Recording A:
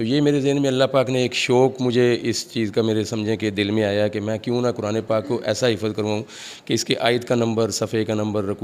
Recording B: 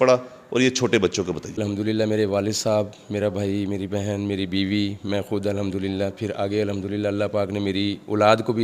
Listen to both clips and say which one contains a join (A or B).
B